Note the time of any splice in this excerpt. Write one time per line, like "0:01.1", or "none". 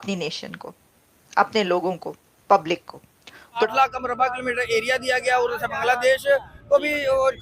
0:03.7